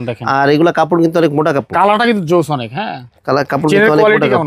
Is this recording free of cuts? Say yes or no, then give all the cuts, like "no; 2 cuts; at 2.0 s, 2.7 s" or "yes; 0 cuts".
yes; 0 cuts